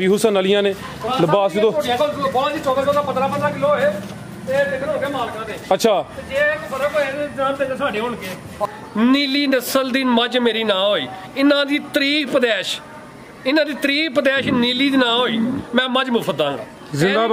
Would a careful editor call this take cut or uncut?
cut